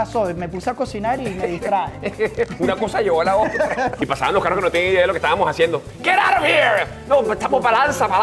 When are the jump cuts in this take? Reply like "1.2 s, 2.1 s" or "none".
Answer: 3.9 s